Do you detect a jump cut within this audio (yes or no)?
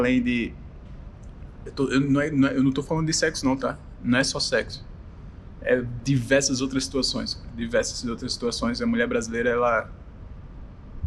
no